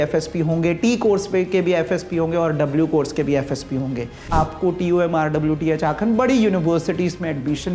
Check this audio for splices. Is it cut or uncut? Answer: cut